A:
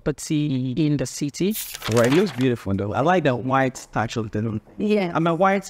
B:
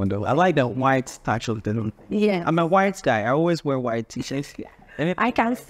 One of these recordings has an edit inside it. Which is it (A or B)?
A